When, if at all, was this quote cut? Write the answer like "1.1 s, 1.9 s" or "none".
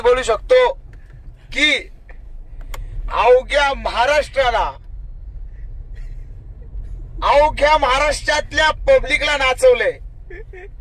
none